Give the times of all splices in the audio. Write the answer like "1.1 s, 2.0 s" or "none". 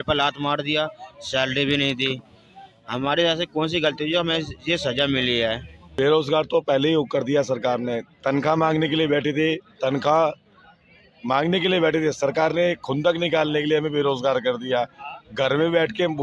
5.8 s